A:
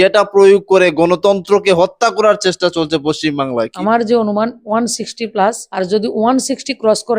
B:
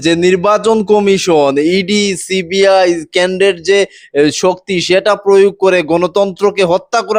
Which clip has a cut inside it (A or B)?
A